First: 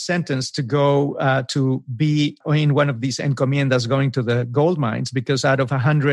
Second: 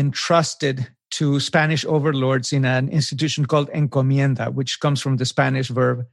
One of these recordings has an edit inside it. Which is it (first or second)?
first